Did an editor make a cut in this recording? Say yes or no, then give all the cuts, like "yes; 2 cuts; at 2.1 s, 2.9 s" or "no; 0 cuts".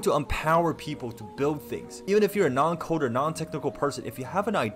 yes; 1 cut; at 1.9 s